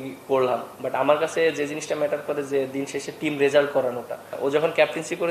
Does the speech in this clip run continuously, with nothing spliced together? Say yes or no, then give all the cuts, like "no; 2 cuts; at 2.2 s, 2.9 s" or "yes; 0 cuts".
no; 1 cut; at 4.3 s